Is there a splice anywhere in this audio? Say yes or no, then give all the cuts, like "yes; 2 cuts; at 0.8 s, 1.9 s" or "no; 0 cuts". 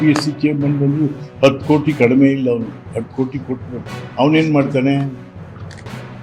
no; 0 cuts